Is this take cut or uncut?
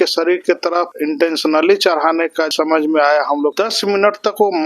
cut